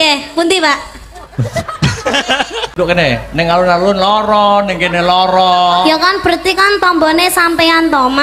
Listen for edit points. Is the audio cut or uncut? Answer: cut